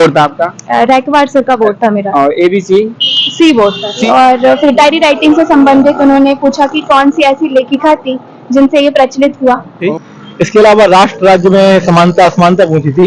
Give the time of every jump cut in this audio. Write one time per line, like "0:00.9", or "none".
0:04.0
0:09.8
0:11.1